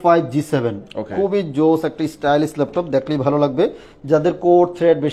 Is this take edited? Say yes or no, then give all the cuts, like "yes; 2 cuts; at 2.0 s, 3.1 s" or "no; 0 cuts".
no; 0 cuts